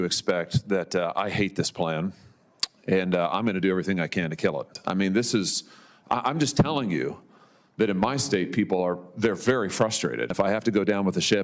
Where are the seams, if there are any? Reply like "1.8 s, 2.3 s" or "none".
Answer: 4.8 s, 10.3 s